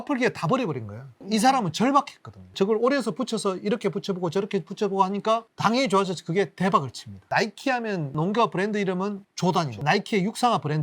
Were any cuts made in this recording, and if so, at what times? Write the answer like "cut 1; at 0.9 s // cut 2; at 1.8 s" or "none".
cut 1; at 8.1 s // cut 2; at 9.8 s